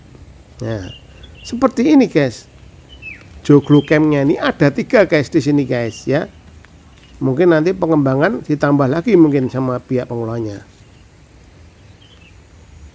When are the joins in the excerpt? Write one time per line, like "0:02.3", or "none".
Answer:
none